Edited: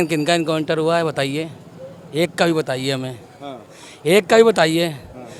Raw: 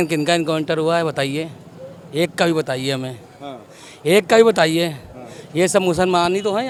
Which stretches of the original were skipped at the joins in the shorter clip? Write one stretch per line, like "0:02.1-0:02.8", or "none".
none